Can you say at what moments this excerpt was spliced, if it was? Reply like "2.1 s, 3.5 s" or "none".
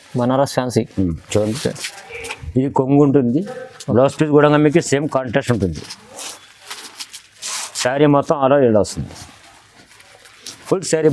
none